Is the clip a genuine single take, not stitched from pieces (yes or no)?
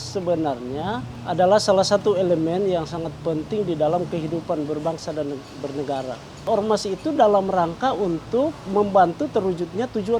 no